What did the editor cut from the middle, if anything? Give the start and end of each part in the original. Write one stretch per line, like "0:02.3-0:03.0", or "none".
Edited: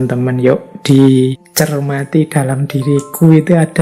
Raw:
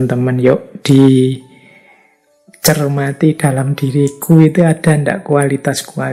0:01.4-0:02.5